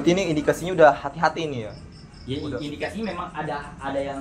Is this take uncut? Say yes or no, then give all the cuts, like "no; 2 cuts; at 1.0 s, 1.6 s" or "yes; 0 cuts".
yes; 0 cuts